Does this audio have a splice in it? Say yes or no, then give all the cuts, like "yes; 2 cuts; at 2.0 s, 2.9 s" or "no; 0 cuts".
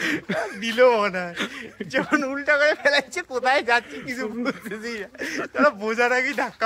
no; 0 cuts